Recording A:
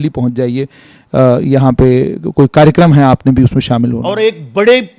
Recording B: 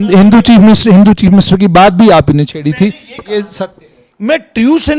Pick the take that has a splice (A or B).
A